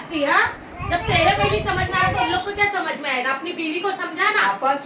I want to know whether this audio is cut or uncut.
uncut